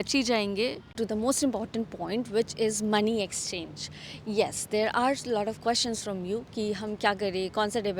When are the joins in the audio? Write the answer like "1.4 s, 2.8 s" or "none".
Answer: 1.0 s